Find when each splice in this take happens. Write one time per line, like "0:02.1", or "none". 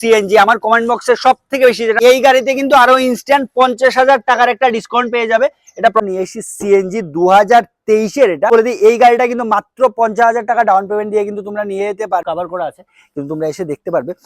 0:02.0
0:06.0
0:08.5
0:12.2